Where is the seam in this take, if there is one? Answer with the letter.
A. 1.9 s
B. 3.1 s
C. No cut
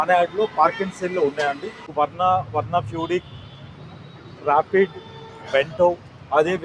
A